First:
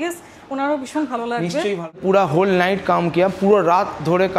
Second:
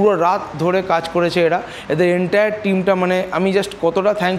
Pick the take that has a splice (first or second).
first